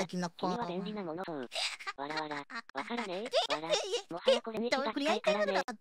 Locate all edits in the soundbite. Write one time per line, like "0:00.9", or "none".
0:01.2
0:04.6